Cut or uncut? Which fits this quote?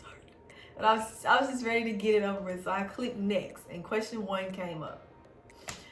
uncut